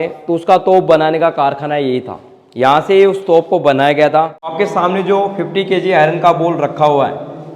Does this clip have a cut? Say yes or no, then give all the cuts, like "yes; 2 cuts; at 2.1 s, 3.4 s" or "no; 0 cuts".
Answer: yes; 1 cut; at 4.5 s